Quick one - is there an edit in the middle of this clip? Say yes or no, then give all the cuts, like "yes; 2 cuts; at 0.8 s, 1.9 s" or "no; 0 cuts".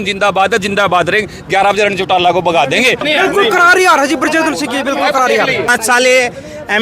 yes; 2 cuts; at 3.0 s, 5.7 s